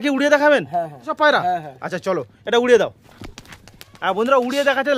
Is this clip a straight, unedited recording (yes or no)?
no